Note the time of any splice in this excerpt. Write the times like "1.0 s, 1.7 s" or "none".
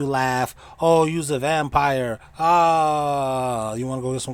none